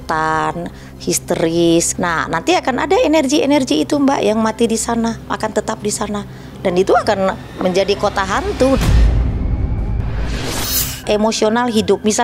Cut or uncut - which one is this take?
cut